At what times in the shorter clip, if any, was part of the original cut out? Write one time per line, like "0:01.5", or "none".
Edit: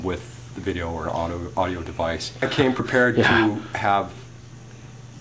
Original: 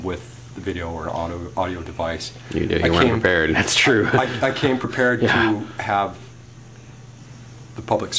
0:02.5

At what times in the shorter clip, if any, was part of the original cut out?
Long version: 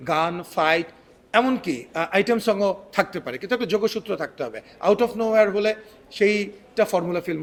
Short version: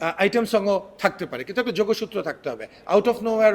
none

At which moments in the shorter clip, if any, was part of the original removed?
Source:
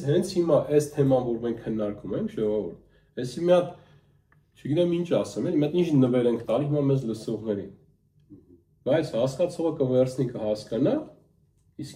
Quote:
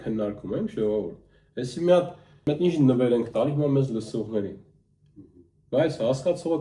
0:02.5

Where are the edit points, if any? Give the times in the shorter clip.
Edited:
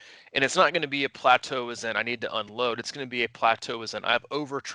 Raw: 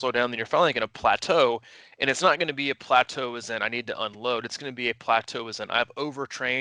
none

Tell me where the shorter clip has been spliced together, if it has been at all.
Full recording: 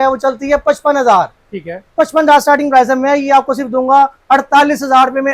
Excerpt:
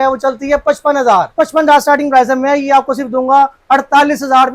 0:01.3

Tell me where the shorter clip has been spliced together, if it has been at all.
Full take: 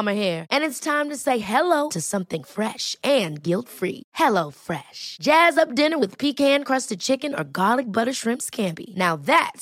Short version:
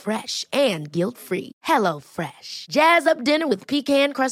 none

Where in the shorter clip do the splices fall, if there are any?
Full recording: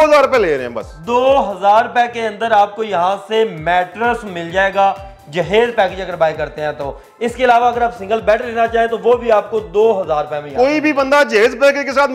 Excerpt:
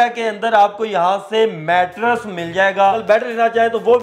0:03.0

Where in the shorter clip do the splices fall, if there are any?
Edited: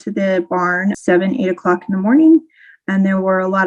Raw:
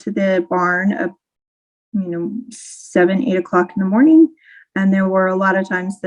0:01.0

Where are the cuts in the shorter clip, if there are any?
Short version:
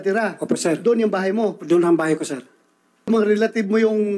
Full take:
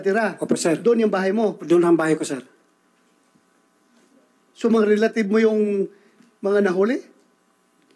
0:03.1

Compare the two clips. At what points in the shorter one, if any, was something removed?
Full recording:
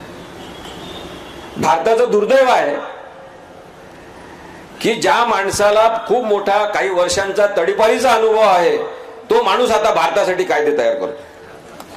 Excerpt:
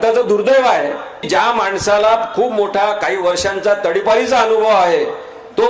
0:01.3

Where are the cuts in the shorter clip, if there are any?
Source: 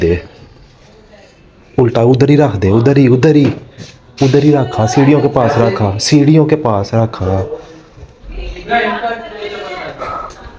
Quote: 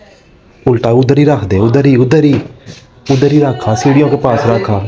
none

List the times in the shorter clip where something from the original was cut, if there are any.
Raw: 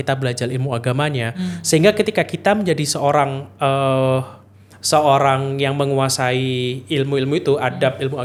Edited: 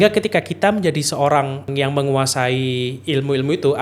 0:01.7

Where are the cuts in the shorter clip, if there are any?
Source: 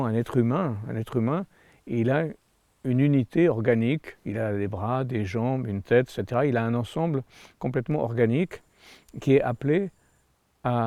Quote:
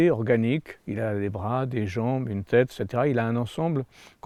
none

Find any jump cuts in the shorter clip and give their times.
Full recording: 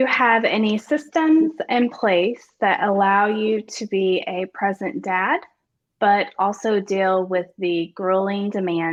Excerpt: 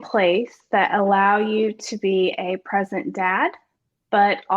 none

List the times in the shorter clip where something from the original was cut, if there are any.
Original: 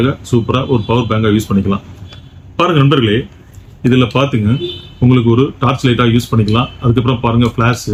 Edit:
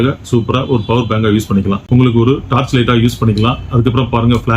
0:01.8

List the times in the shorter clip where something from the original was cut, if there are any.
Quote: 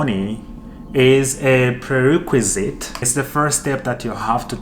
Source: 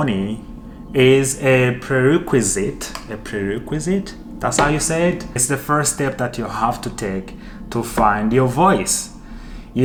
0:03.0

